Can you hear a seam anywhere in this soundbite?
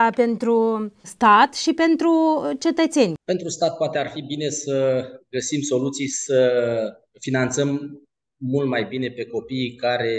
yes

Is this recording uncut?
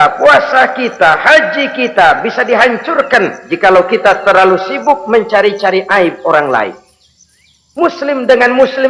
yes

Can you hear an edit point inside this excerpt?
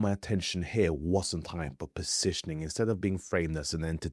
no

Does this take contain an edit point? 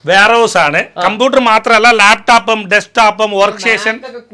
no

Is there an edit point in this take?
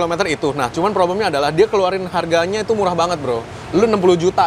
no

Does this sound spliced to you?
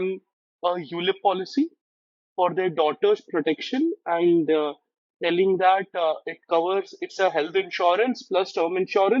no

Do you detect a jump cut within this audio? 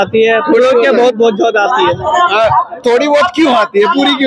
no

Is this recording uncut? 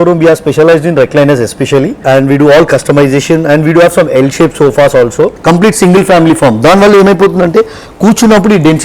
no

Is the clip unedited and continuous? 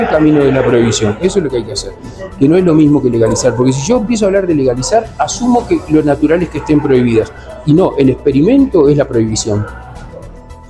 yes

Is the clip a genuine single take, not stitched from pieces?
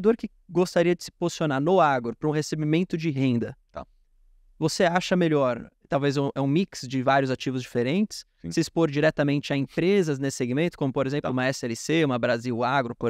yes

